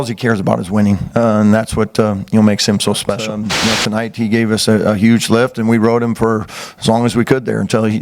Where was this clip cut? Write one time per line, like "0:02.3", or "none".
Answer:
0:03.3